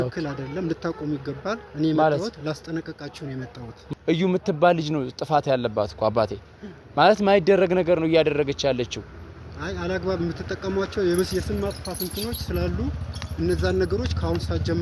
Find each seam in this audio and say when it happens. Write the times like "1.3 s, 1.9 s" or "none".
3.8 s